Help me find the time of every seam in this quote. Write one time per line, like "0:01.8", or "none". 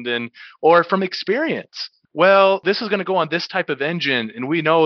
0:02.6